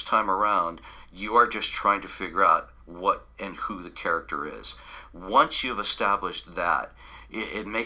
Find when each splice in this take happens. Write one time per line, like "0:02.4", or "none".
none